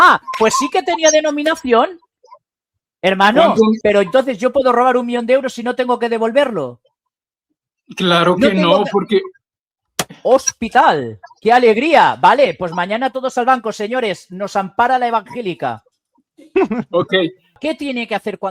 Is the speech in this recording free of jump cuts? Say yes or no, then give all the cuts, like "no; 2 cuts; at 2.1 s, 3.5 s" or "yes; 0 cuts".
no; 2 cuts; at 3.8 s, 17.5 s